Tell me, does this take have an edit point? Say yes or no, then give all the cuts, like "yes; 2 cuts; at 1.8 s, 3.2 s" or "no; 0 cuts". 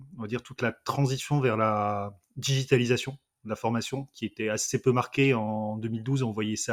no; 0 cuts